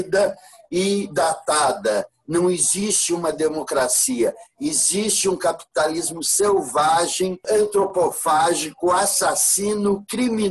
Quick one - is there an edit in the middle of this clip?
yes; 1 cut; at 7.4 s

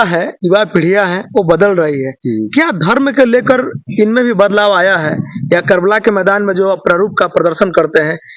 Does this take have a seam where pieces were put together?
no; 0 cuts

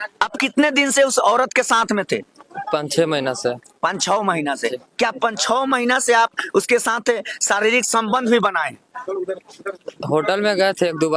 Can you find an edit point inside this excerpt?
no; 0 cuts

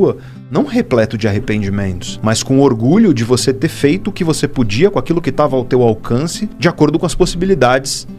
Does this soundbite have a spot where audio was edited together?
yes; 2 cuts; at 2.0 s, 6.4 s

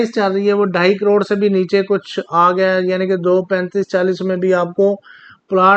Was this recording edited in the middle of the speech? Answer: no; 0 cuts

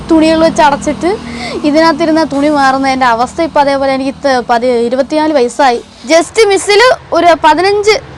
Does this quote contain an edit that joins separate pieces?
yes; 1 cut; at 5.9 s

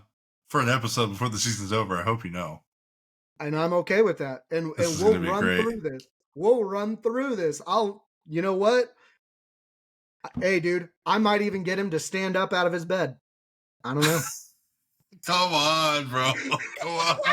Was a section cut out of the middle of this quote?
no; 0 cuts

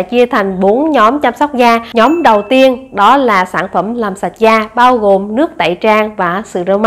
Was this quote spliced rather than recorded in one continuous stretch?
yes; 1 cut; at 1.9 s

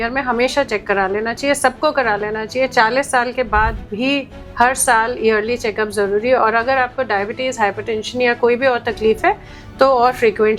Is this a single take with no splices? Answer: yes; 0 cuts

